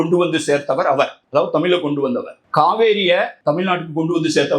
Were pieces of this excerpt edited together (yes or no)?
yes